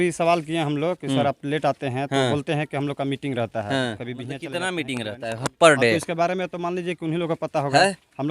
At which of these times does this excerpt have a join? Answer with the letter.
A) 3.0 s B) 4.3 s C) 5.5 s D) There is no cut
B